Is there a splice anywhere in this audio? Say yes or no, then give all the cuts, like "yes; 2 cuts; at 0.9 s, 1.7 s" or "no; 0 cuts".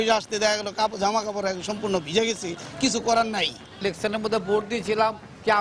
yes; 1 cut; at 3.8 s